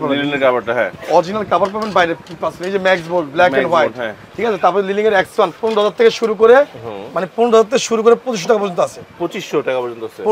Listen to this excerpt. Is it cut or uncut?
uncut